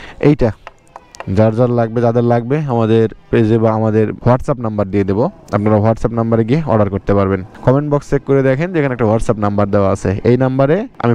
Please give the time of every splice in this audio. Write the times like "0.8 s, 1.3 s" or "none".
none